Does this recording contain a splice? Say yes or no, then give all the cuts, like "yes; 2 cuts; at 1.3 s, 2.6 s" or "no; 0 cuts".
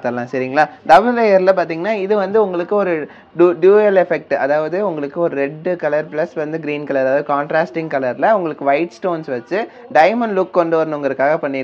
no; 0 cuts